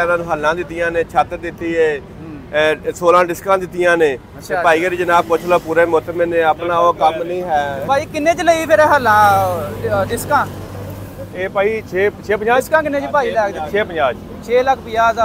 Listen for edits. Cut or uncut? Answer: uncut